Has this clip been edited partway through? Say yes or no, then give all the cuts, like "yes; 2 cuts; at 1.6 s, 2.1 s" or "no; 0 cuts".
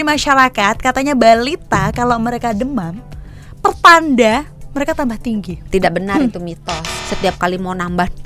yes; 2 cuts; at 5.7 s, 6.9 s